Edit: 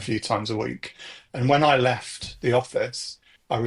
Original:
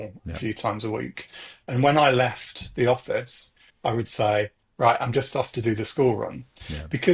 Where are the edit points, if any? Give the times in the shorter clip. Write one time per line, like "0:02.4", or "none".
none